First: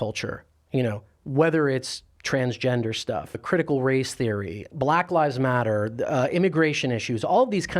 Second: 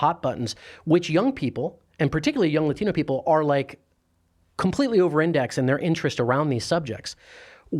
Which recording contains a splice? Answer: first; 2 cuts; at 3.4 s, 4.7 s

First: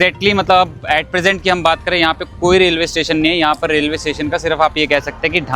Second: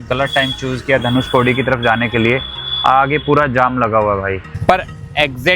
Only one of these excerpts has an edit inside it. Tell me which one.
second; 1 cut; at 4.4 s

